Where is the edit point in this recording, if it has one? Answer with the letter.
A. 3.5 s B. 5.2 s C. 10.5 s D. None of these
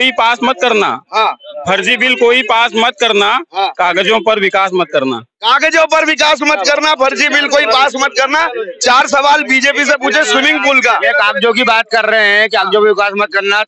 D